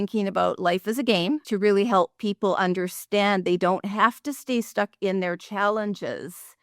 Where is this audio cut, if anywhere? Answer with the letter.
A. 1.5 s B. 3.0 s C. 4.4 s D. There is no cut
A